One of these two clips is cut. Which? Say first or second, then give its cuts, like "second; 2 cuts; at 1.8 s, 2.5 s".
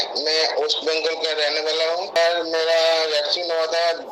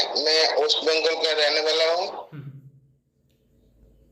first; 1 cut; at 2.2 s